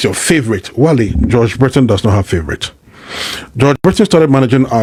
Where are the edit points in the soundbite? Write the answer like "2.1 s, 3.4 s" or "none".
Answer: none